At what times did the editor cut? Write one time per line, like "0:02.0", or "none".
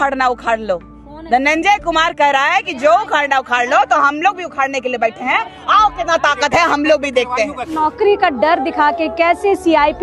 0:07.8